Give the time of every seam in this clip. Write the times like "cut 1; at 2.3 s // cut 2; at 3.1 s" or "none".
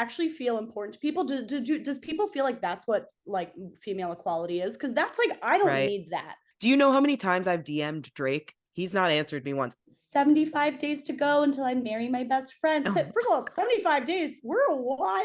cut 1; at 6.4 s // cut 2; at 9.8 s